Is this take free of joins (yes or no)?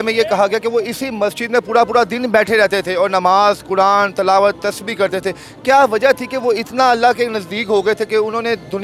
yes